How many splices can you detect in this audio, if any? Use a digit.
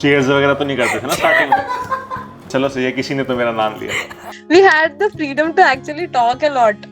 2